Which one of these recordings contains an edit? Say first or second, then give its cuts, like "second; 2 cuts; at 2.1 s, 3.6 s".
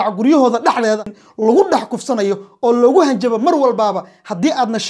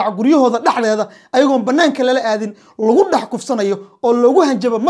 first; 1 cut; at 1.2 s